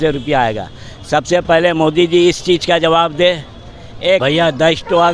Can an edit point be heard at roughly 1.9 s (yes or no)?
no